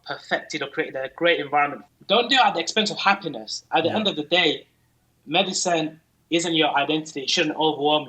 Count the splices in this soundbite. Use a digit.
1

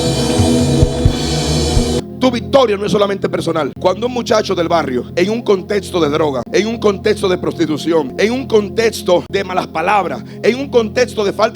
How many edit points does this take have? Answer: 6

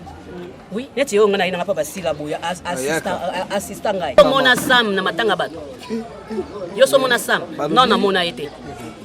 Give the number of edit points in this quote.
1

